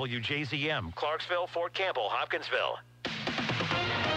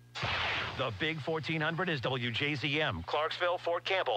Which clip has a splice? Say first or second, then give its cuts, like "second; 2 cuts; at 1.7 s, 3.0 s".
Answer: first; 1 cut; at 3.0 s